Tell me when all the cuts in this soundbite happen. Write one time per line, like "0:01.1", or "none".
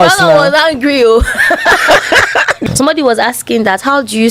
0:02.5